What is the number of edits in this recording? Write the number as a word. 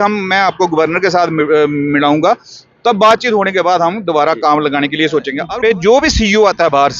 one